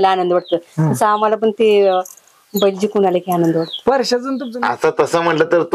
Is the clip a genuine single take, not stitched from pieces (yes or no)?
no